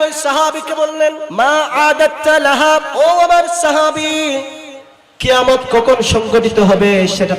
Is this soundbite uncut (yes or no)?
no